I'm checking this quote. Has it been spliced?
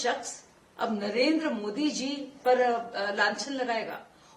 no; 0 cuts

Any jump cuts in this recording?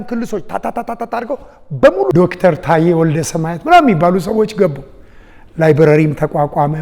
yes; 1 cut; at 2.1 s

